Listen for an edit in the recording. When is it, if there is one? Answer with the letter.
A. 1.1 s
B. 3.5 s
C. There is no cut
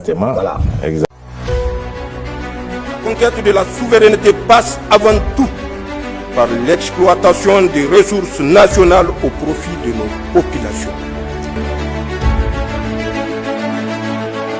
A